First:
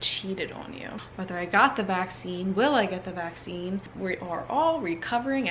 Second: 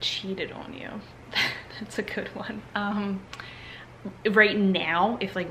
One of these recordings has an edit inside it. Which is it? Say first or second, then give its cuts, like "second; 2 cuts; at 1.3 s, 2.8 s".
first; 2 cuts; at 1.0 s, 3.9 s